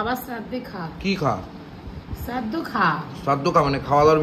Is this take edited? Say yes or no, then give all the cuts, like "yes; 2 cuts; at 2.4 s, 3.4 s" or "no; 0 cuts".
no; 0 cuts